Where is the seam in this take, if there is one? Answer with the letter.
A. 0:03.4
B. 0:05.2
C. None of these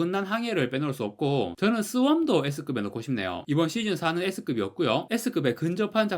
A